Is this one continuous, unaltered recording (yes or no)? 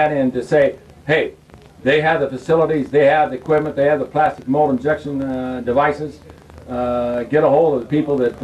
no